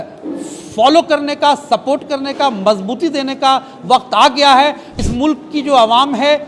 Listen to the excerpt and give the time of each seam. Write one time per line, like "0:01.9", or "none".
0:04.9